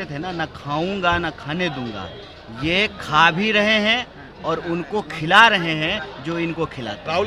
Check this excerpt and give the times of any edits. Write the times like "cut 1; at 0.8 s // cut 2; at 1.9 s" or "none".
none